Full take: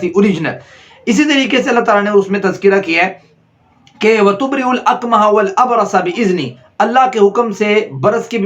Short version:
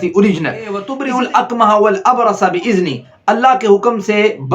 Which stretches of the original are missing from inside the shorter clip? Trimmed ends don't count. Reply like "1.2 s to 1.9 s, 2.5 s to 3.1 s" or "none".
0.9 s to 4.4 s